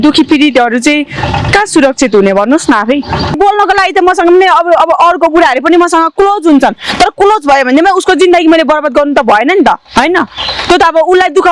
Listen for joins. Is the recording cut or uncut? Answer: cut